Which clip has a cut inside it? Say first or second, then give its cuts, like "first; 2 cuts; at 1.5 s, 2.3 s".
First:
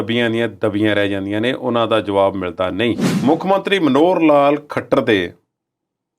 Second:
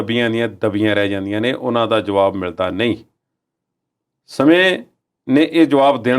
first; 1 cut; at 3.1 s